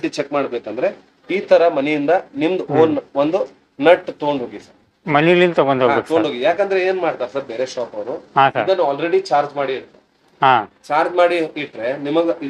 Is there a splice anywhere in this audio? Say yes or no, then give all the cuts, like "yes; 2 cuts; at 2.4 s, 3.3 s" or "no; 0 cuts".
no; 0 cuts